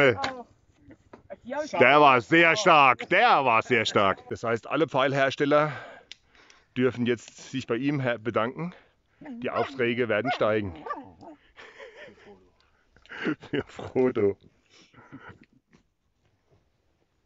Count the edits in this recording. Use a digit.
1